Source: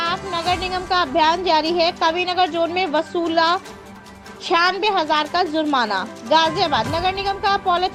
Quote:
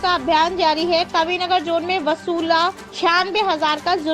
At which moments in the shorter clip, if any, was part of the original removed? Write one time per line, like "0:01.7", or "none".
0:02.9